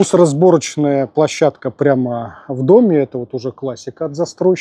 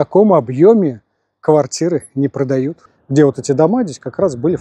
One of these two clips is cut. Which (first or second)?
second